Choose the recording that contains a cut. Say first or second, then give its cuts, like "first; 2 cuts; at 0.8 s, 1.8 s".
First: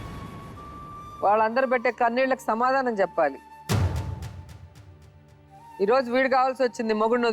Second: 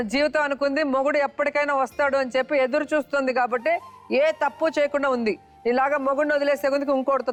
first; 1 cut; at 1.0 s